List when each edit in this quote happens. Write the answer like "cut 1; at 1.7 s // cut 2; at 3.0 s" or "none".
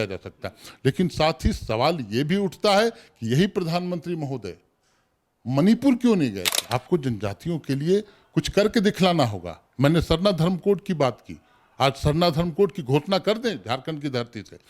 cut 1; at 6.5 s